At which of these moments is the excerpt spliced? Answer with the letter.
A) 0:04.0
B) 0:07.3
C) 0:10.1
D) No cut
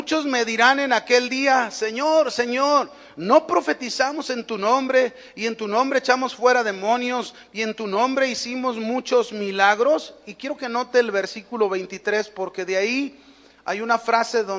D